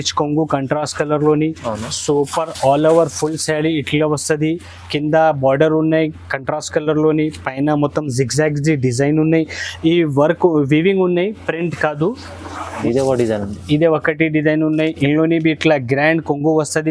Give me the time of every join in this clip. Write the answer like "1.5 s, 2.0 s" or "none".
12.8 s